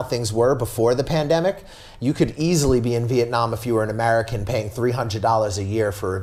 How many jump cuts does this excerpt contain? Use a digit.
0